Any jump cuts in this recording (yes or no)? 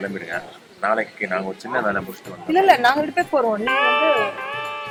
no